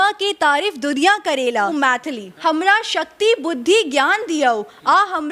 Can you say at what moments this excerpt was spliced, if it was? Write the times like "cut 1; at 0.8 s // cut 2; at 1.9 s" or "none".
cut 1; at 2.1 s